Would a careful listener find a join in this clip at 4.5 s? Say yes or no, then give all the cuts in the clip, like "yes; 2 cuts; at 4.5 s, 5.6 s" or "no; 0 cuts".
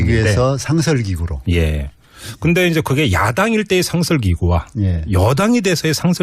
no; 1 cut; at 0.9 s